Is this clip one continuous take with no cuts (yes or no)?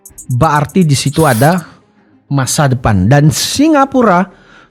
yes